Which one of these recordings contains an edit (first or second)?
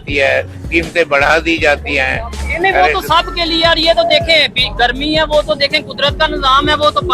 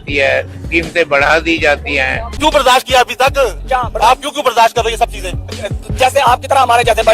second